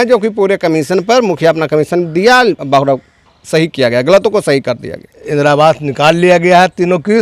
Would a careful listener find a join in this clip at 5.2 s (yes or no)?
yes